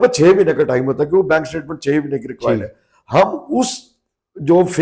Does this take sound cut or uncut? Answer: uncut